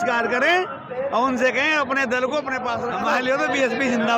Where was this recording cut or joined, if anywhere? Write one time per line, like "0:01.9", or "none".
0:02.9